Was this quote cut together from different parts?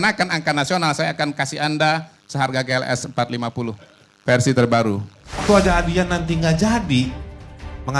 yes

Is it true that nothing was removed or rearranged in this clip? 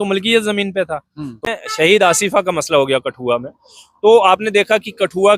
no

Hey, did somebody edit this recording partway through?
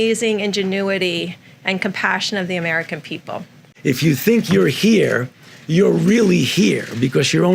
yes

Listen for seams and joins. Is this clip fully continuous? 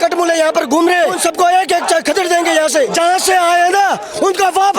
no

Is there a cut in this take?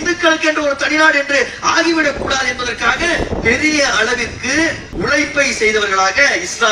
yes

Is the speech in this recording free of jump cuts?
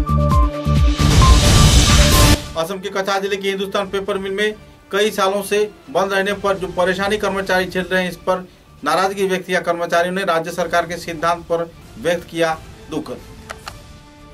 yes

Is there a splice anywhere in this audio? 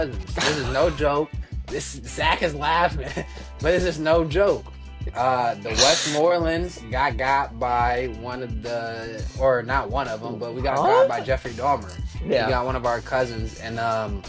no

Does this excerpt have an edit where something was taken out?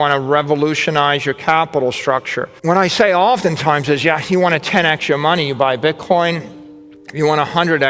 yes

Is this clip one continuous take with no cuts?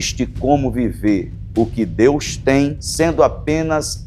no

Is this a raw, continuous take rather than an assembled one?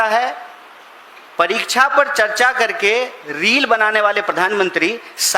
yes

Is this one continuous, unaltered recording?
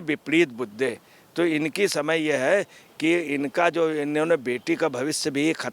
yes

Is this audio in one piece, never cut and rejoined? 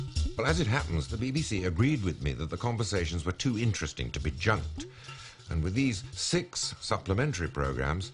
no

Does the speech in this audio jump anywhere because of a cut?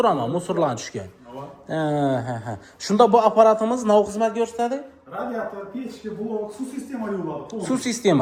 no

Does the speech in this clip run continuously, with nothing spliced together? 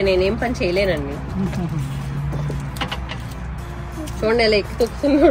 yes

